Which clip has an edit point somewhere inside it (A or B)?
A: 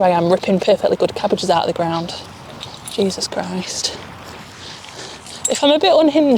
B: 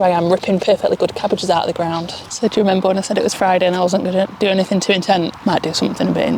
B